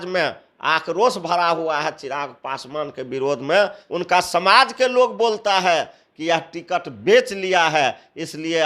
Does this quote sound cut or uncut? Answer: cut